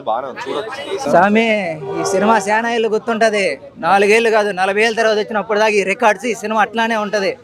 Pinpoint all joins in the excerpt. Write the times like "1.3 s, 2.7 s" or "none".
1.0 s